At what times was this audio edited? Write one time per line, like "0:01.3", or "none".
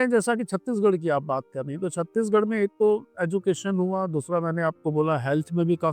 none